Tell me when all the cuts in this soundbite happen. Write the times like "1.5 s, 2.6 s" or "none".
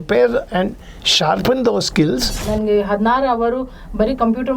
2.5 s

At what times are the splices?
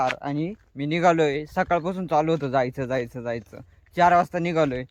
none

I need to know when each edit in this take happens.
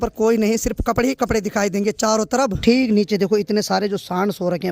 2.6 s

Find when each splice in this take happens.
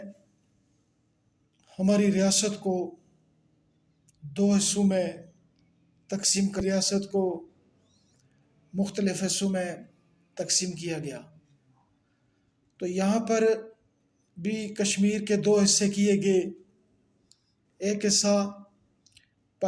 6.6 s

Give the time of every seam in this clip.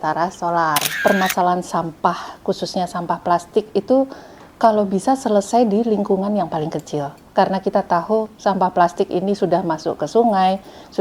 0.9 s

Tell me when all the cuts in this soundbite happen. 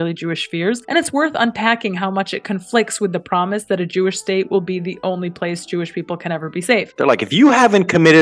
0.8 s, 6.9 s

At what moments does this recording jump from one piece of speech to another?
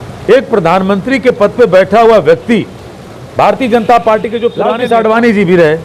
4.6 s

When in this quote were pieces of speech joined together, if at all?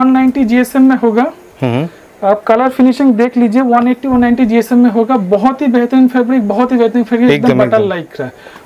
none

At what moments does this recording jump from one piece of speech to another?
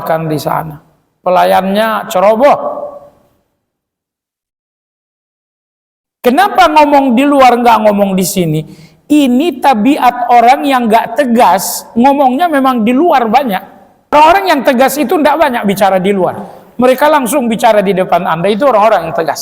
14.1 s

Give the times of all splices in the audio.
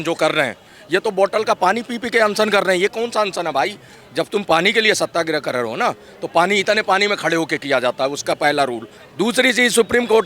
9.0 s

